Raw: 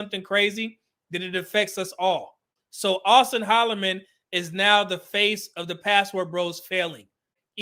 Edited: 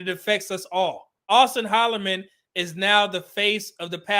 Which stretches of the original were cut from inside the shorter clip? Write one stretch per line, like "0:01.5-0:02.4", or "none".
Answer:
0:02.5-0:03.0